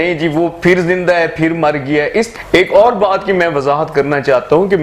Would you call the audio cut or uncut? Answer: cut